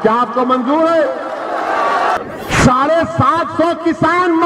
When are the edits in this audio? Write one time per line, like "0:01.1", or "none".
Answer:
0:02.2

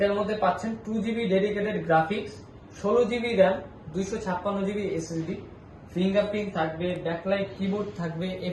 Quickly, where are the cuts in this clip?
none

